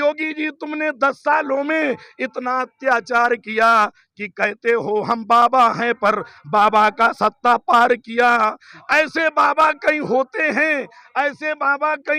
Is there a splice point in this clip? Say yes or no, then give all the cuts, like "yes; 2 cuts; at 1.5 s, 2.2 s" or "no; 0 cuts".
no; 0 cuts